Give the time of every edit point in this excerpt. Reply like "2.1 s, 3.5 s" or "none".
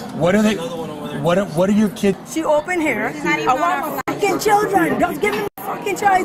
2.2 s